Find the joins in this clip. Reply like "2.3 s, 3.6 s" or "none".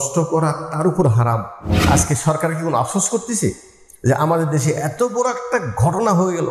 1.9 s

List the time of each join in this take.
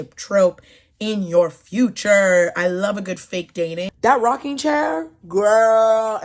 3.9 s

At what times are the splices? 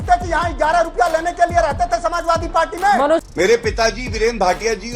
3.2 s

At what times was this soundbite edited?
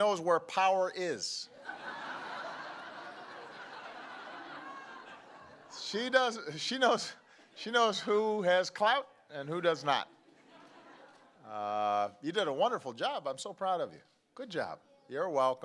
3.3 s

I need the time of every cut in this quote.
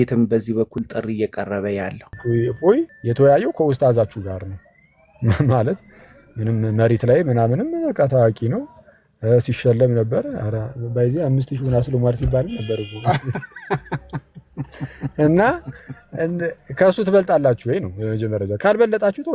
2.1 s, 3.0 s

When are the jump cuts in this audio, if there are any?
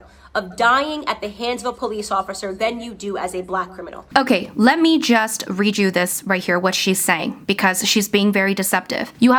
none

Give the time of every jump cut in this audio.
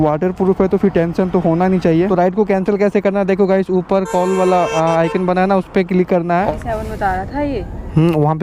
2.1 s, 6.5 s

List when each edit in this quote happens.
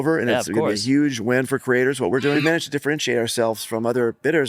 2.4 s

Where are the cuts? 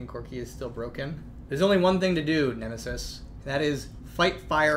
1.3 s

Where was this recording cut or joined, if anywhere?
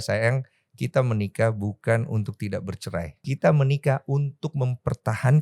3.3 s

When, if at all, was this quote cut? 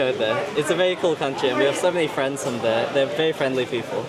none

